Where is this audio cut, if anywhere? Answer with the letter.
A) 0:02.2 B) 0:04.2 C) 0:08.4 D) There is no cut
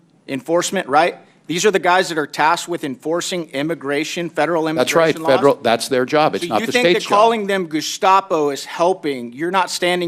D